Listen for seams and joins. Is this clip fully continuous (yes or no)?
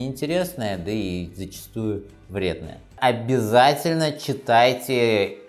no